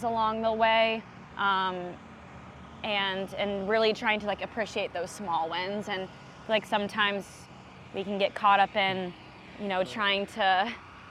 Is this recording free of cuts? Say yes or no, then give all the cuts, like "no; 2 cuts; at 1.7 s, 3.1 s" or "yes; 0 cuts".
yes; 0 cuts